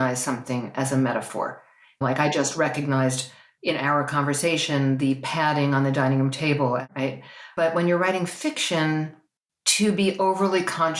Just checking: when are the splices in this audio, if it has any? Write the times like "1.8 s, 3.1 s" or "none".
2.0 s, 6.8 s